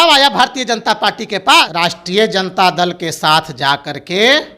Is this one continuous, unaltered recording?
no; 1 cut; at 1.7 s

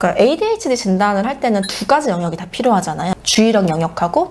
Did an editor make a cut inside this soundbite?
no; 0 cuts

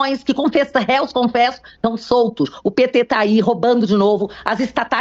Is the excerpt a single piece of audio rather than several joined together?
yes; 0 cuts

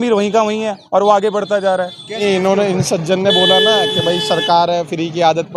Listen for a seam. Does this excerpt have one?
yes; 1 cut; at 2.2 s

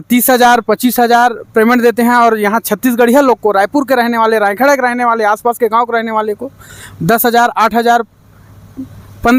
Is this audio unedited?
yes; 0 cuts

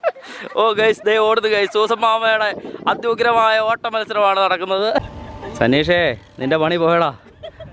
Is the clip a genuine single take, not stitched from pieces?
no; 1 cut; at 5.1 s

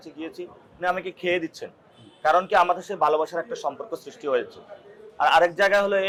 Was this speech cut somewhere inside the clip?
no; 0 cuts

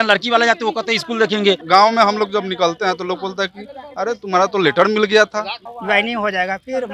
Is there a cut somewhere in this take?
yes; 2 cuts; at 1.6 s, 5.7 s

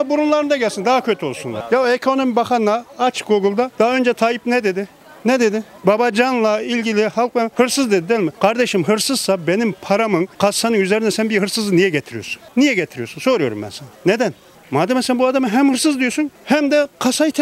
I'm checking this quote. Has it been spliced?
no; 0 cuts

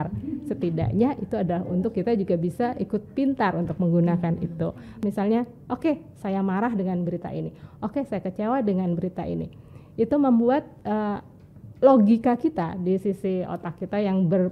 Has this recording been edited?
yes; 1 cut; at 5.0 s

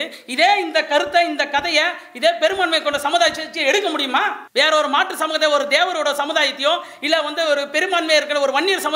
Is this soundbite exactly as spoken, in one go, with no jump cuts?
no; 1 cut; at 4.4 s

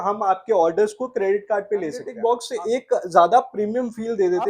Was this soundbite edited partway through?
yes; 1 cut; at 2.1 s

